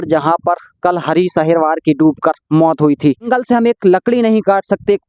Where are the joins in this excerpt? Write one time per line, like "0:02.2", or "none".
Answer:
0:03.3